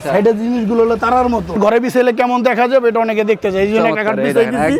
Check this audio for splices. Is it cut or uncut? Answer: cut